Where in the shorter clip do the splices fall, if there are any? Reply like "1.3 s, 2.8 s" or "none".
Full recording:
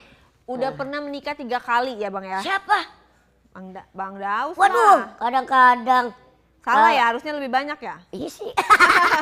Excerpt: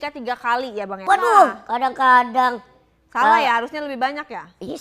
1.0 s